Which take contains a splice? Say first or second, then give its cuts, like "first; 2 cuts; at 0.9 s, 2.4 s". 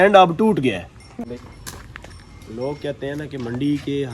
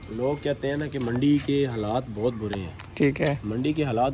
first; 1 cut; at 1.1 s